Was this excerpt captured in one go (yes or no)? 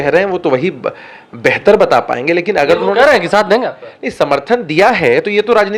yes